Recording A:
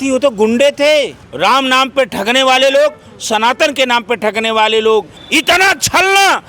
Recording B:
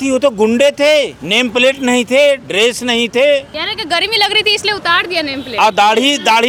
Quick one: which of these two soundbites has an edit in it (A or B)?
A